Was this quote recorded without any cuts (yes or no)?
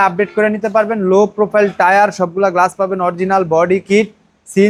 yes